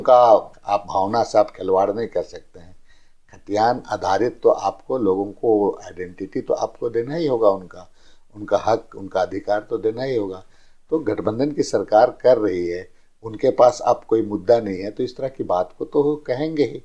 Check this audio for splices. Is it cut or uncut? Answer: uncut